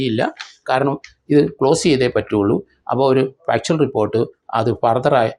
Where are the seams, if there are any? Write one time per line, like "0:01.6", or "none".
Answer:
none